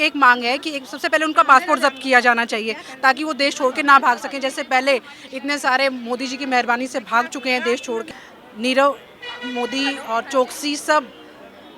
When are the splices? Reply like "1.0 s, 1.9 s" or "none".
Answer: 8.1 s